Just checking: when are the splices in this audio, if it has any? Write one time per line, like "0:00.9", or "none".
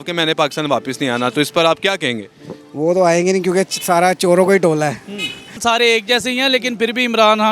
0:05.6